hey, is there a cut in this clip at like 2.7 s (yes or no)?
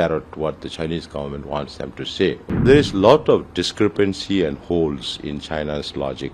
yes